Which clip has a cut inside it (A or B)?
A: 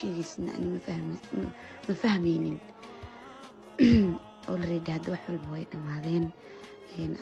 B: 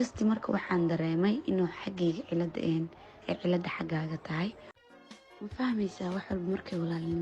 B